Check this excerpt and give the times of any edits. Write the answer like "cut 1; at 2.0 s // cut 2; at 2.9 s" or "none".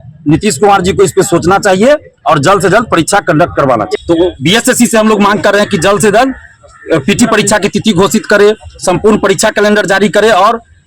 cut 1; at 3.9 s